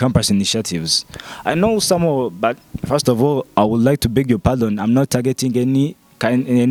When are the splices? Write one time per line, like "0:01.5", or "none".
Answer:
none